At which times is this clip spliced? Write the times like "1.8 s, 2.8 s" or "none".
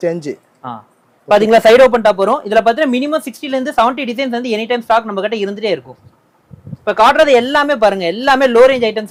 none

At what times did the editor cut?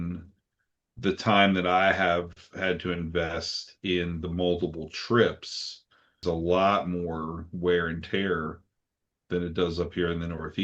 6.2 s

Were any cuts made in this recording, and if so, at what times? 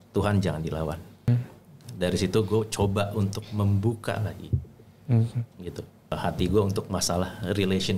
1.3 s, 6.1 s

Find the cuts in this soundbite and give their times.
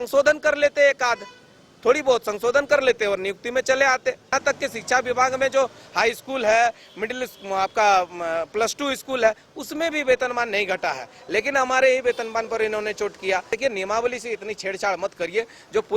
4.3 s, 13.5 s

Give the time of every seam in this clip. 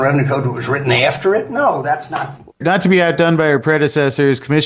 2.6 s

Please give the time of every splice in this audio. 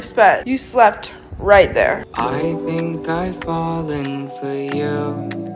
none

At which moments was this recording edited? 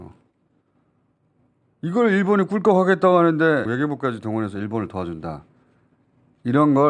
3.7 s

